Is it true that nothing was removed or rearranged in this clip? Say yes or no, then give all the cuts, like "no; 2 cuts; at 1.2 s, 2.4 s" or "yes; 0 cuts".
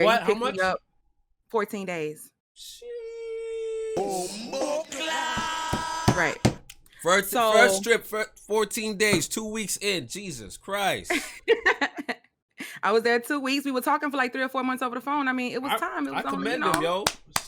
yes; 0 cuts